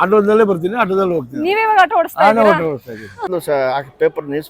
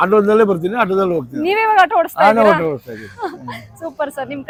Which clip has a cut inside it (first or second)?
first